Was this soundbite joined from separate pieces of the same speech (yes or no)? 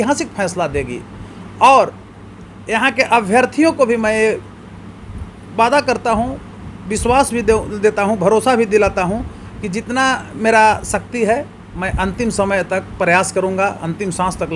no